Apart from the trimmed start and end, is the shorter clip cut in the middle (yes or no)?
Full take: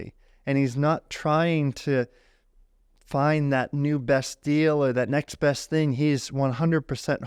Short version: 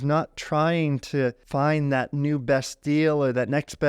yes